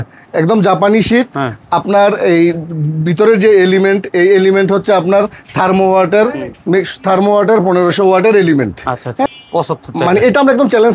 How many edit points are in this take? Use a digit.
1